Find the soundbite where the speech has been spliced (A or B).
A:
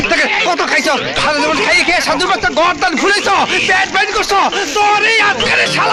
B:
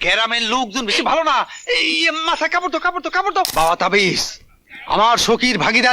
B